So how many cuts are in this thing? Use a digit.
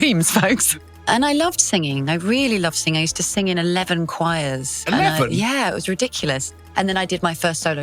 2